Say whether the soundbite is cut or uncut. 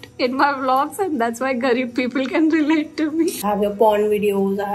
cut